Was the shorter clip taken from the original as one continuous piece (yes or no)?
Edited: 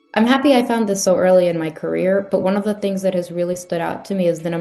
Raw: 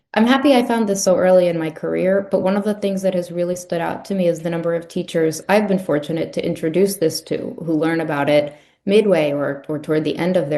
yes